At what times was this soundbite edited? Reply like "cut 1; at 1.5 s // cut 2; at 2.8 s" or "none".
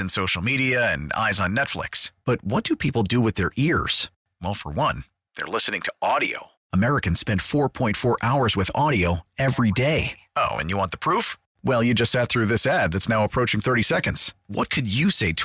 none